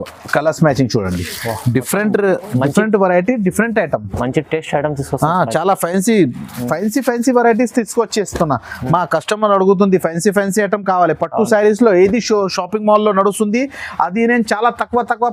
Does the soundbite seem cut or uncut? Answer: uncut